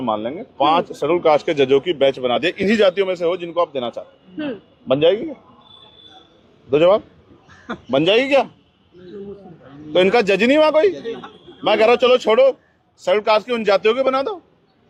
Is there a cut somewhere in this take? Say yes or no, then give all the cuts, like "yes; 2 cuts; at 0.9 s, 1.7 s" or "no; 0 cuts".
no; 0 cuts